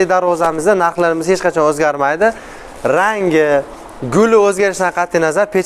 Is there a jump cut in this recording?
no; 0 cuts

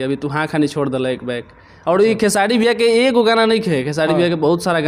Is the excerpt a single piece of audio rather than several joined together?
yes; 0 cuts

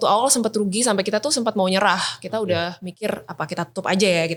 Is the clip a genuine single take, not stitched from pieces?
yes; 0 cuts

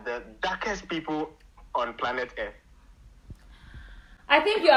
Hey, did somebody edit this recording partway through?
no; 0 cuts

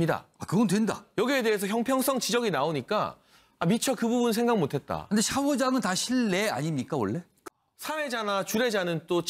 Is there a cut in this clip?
yes; 1 cut; at 7.4 s

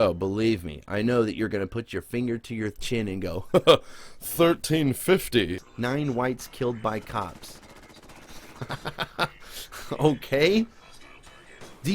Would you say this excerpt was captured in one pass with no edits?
no; 1 cut; at 5.6 s

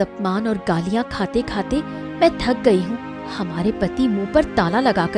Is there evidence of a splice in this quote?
no; 0 cuts

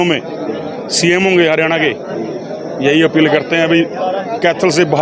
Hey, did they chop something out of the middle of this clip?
no; 0 cuts

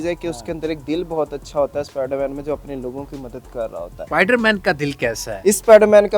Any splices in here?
yes; 2 cuts; at 4.0 s, 5.3 s

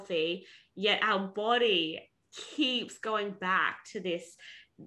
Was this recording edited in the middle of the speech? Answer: no; 0 cuts

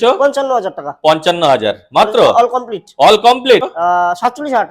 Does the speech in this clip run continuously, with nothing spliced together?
no; 1 cut; at 3.7 s

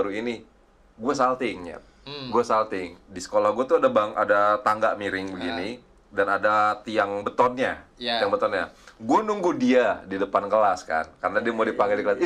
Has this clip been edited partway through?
no; 0 cuts

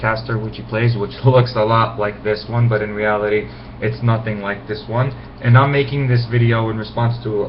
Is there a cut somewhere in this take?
yes; 1 cut; at 5.1 s

